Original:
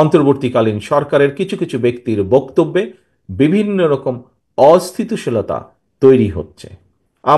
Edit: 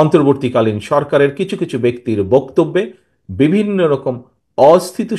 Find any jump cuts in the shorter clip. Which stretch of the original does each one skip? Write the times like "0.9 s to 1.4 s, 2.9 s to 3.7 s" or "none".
none